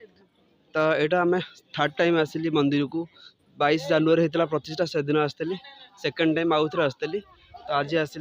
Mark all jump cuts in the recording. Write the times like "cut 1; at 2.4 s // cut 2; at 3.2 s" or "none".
none